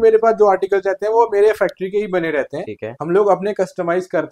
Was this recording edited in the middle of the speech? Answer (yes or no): no